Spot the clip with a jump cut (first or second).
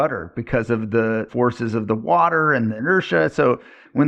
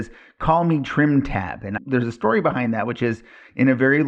first